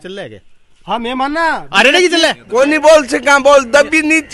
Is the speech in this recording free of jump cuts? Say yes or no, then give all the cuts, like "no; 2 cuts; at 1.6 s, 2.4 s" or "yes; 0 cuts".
no; 1 cut; at 2.5 s